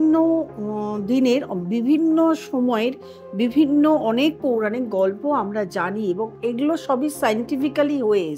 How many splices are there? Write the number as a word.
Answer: zero